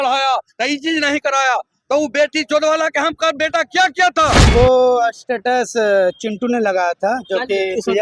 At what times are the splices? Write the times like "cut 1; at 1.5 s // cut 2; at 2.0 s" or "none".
cut 1; at 4.4 s